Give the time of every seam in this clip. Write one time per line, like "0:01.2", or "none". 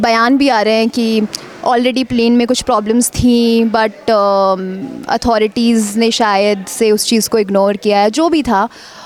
none